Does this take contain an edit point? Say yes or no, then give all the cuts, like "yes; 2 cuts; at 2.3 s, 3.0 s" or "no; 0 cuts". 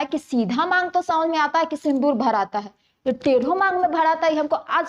no; 0 cuts